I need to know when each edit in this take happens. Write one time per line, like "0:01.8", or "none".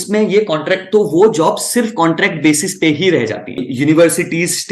0:03.7